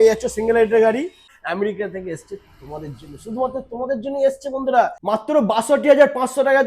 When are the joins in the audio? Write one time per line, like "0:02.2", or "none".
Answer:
0:01.2
0:05.0

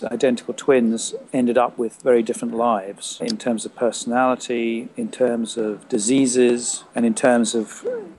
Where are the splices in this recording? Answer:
0:01.1
0:03.2
0:04.9
0:06.8

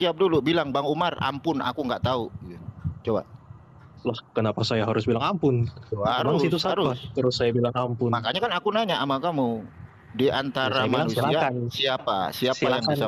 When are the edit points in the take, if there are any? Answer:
none

